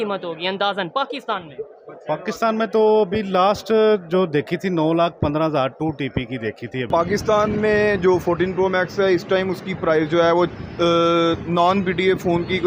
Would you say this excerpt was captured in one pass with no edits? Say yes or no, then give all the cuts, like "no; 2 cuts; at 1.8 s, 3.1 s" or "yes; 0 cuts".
no; 1 cut; at 6.9 s